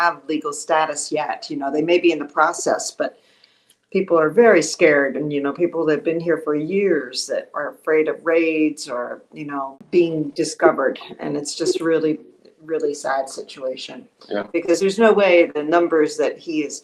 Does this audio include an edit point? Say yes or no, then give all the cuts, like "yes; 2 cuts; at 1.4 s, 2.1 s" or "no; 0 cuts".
yes; 1 cut; at 9.8 s